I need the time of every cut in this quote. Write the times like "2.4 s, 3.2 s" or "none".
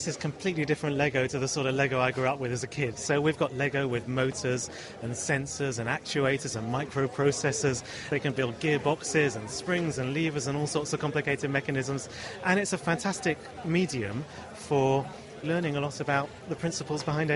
3.0 s, 8.1 s, 15.4 s